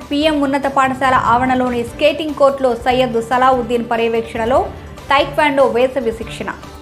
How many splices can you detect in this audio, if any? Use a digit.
0